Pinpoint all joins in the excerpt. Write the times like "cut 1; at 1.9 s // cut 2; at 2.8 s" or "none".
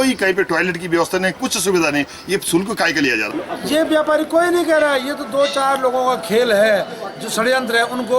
cut 1; at 3.4 s